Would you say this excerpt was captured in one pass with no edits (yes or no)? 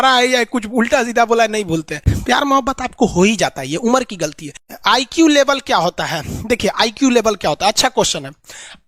no